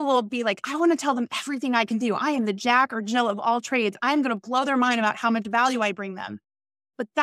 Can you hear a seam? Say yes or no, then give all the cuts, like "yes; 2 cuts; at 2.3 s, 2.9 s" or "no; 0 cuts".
no; 0 cuts